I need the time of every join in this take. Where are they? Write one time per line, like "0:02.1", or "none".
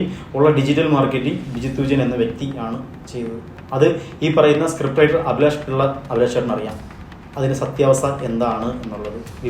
0:03.6